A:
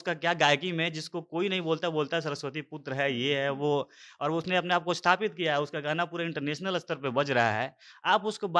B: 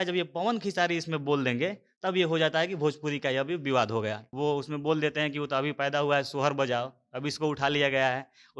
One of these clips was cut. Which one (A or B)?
B